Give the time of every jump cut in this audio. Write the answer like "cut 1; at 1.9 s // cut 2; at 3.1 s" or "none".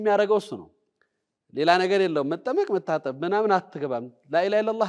none